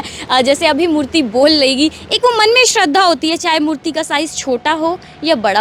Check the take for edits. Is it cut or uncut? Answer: uncut